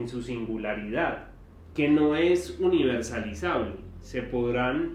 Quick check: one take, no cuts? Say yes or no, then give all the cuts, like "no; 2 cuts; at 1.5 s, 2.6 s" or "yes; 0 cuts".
yes; 0 cuts